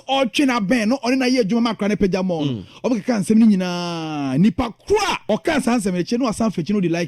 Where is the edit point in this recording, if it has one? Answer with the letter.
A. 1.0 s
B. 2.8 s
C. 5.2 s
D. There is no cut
C